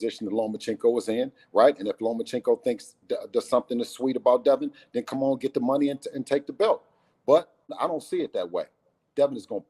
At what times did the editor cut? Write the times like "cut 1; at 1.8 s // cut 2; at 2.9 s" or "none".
cut 1; at 7.7 s